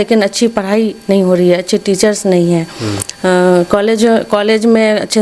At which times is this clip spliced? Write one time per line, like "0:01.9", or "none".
none